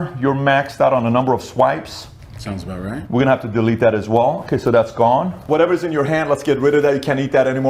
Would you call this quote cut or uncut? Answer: uncut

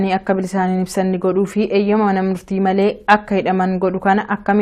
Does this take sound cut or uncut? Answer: uncut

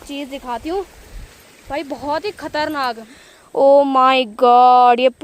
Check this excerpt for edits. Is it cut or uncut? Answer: cut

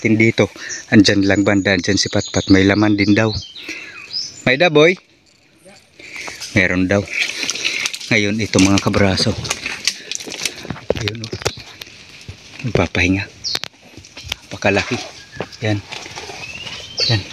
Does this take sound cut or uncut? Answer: uncut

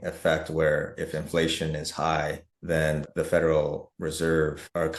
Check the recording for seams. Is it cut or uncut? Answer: uncut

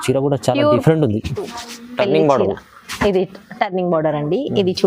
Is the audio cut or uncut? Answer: cut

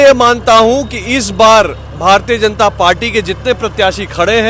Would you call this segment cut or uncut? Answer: uncut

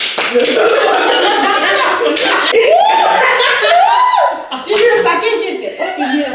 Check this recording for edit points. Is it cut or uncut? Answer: cut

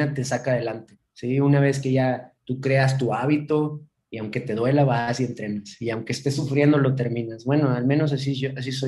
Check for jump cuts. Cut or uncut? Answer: uncut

